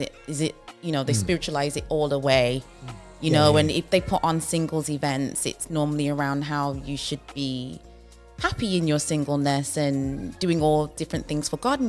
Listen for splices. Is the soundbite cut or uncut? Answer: uncut